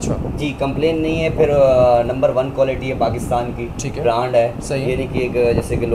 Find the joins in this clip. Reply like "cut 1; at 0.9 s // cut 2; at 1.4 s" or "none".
none